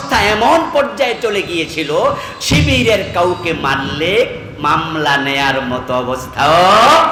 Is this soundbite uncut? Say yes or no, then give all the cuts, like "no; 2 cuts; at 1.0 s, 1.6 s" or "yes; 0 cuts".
yes; 0 cuts